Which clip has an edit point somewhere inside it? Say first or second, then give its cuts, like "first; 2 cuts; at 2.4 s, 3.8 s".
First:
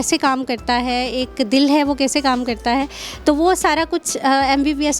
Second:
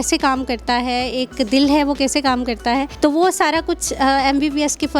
second; 1 cut; at 2.9 s